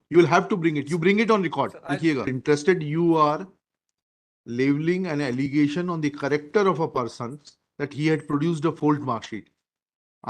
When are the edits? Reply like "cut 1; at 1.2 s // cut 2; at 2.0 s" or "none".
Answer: cut 1; at 2.3 s